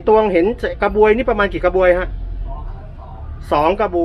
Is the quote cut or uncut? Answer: uncut